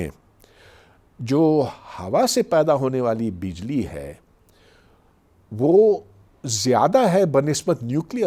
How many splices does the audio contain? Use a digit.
0